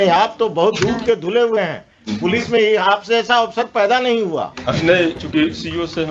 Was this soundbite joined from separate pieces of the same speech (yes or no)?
no